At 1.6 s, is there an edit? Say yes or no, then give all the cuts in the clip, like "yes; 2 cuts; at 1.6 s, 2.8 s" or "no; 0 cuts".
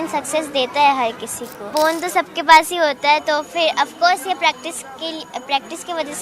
yes; 1 cut; at 1.6 s